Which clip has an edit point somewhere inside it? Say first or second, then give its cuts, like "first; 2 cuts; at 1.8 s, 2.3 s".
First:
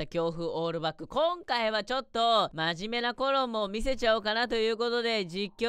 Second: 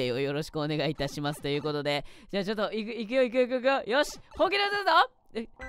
first; 1 cut; at 2.5 s